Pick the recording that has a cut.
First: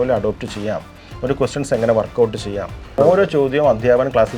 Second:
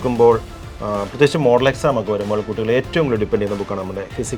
first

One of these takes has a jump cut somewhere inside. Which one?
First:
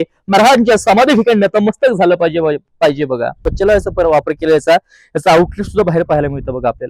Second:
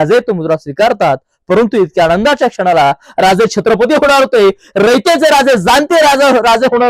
first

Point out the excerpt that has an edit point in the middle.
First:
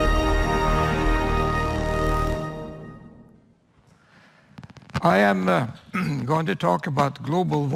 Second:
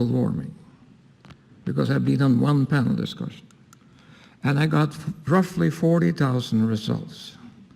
second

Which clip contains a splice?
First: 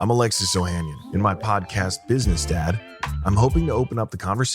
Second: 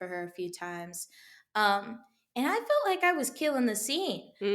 first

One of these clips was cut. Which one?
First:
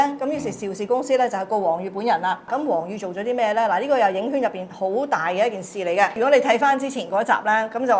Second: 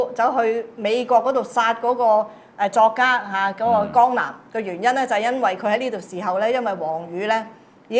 first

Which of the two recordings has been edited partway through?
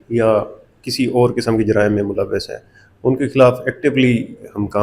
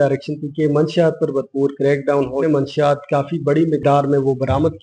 second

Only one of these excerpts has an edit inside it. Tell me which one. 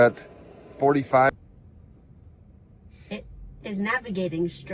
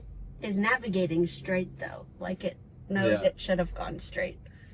first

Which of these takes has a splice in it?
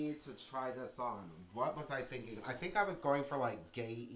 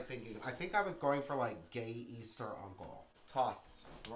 second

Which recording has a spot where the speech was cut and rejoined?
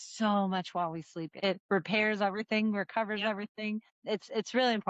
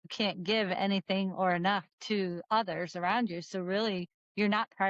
first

